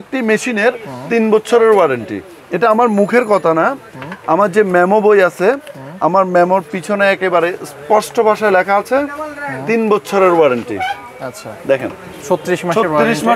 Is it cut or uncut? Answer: uncut